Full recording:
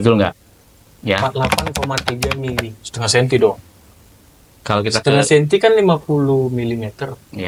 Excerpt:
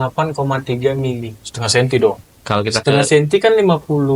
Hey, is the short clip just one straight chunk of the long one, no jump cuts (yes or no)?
no